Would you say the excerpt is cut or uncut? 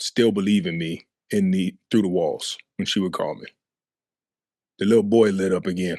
uncut